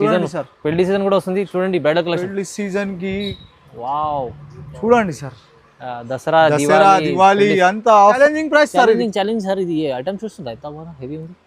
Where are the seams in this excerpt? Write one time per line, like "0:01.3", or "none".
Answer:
0:08.2